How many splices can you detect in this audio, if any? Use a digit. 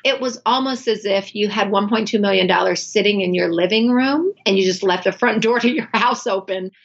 0